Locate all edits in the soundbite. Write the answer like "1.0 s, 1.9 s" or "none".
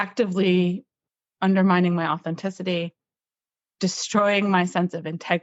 none